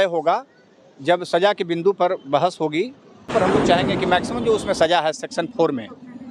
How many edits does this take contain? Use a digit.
1